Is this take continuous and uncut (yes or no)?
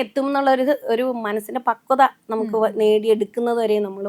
yes